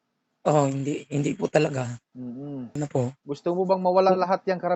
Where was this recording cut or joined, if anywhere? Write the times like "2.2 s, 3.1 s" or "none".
2.8 s